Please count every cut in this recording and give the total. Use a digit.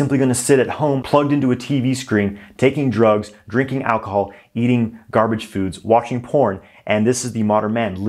1